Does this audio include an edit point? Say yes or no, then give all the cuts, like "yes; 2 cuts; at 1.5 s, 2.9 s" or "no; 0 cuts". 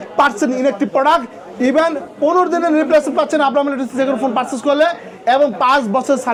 no; 0 cuts